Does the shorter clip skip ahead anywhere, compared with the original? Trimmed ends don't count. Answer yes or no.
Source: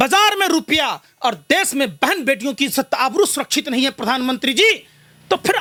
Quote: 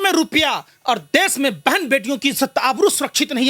no